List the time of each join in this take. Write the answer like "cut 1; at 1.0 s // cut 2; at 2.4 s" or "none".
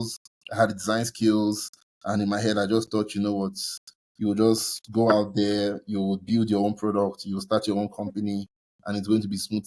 none